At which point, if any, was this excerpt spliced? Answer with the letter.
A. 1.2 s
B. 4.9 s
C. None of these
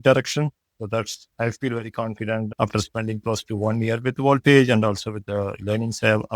A